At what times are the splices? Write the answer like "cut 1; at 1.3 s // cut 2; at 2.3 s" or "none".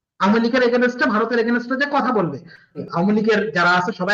cut 1; at 2.8 s